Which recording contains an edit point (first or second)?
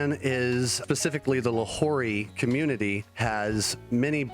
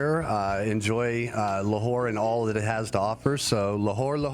first